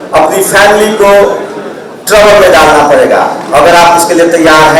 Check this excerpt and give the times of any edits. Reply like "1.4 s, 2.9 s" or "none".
none